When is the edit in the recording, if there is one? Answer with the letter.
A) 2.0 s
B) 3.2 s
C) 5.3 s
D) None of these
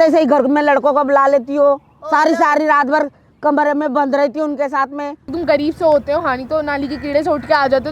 C